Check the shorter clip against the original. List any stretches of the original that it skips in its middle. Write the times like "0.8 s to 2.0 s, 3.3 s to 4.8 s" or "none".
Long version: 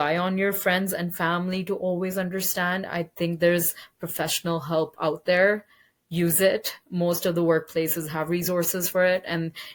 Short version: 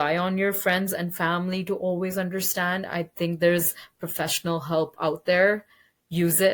none